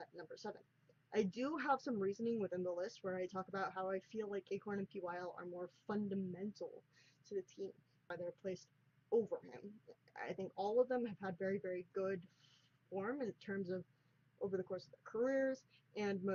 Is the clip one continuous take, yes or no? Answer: yes